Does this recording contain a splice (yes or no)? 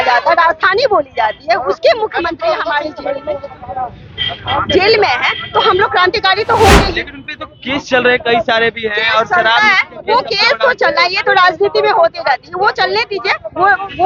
no